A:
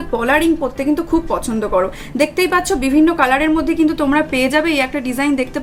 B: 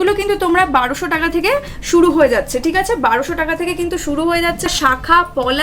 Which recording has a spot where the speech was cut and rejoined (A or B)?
B